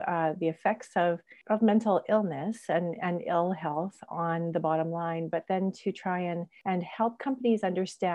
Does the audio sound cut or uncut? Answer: cut